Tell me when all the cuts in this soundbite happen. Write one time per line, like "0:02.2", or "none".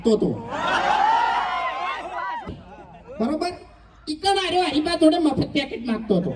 0:02.5